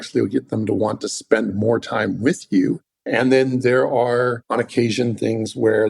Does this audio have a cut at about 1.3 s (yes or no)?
no